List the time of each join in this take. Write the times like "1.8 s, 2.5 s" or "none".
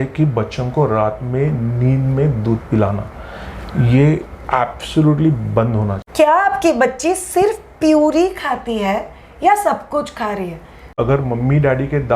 6.0 s, 11.0 s